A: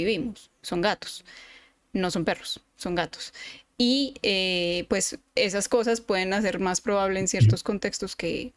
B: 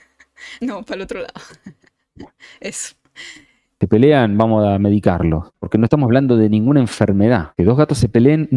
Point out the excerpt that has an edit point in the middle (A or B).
B